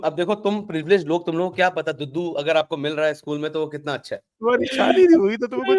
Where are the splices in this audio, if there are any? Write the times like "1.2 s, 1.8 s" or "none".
4.4 s